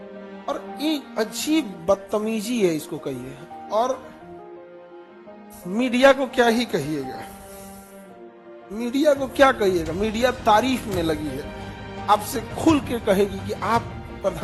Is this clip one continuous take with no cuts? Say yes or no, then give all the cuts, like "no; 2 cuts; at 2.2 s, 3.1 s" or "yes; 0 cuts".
yes; 0 cuts